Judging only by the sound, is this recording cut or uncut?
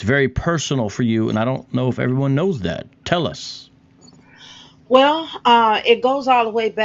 cut